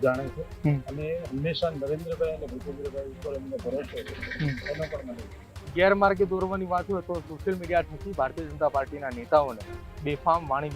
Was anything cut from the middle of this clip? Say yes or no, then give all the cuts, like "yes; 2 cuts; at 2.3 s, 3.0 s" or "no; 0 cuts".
yes; 1 cut; at 5.6 s